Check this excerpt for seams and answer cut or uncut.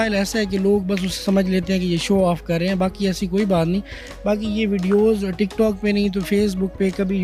uncut